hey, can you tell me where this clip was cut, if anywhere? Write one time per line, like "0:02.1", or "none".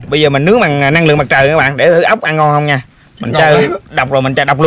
none